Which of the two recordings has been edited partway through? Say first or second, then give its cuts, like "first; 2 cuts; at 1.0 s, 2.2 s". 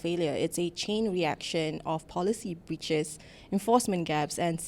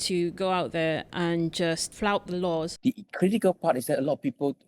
second; 2 cuts; at 1.9 s, 2.7 s